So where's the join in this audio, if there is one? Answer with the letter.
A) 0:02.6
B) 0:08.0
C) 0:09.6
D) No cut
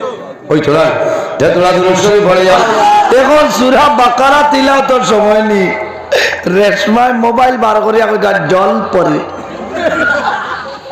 A